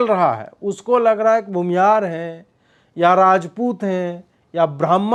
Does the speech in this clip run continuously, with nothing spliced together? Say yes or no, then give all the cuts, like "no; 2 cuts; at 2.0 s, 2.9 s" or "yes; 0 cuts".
yes; 0 cuts